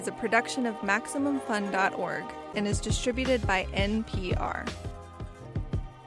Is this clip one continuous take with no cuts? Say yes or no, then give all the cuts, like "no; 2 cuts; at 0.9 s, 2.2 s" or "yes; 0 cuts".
yes; 0 cuts